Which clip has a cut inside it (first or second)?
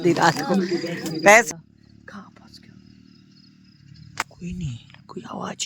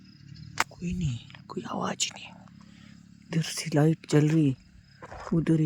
first